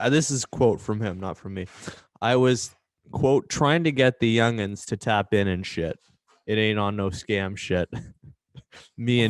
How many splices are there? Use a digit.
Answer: 0